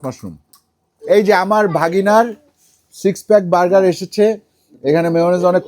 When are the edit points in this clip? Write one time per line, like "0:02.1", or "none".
0:01.0